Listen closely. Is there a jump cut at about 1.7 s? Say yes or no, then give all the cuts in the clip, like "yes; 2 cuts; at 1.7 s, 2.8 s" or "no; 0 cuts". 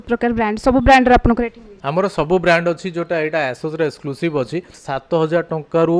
no; 1 cut; at 4.8 s